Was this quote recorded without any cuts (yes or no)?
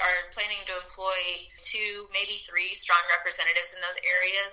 no